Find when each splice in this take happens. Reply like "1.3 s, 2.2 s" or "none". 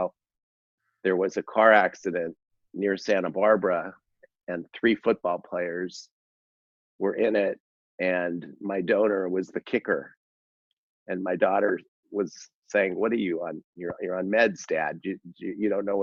none